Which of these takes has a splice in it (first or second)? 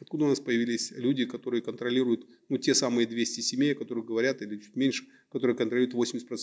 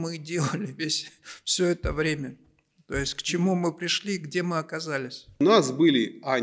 second